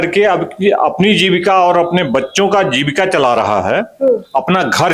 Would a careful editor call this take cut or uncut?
uncut